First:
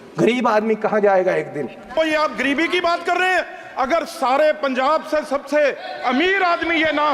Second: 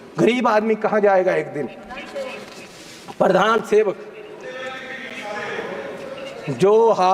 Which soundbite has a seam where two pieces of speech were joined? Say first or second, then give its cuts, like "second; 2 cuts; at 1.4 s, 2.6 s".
first; 1 cut; at 2.0 s